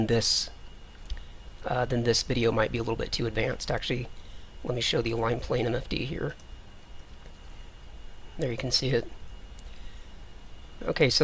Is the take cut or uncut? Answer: uncut